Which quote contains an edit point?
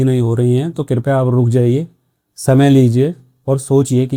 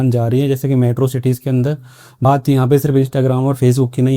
second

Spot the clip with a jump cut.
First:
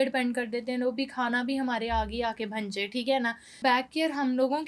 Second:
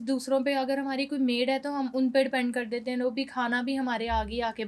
first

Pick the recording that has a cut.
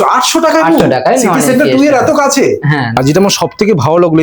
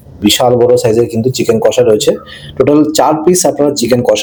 first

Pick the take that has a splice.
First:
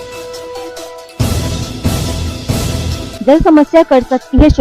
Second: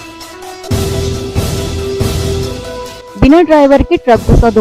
first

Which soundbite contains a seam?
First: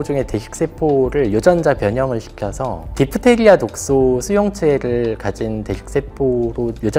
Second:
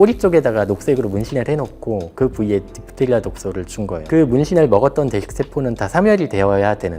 second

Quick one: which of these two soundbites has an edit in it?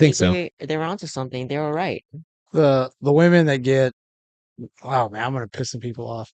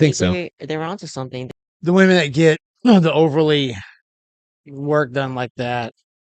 second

